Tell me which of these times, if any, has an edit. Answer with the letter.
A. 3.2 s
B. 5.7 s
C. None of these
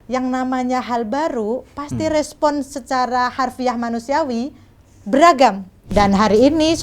B